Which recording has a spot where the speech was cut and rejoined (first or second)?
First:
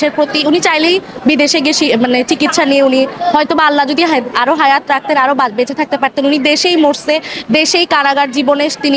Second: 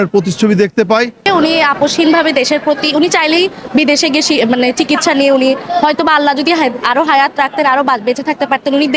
second